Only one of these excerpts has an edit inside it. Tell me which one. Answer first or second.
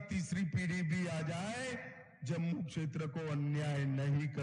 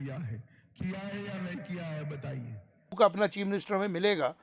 second